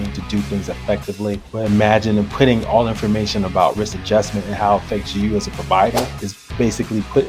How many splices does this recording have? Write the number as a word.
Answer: zero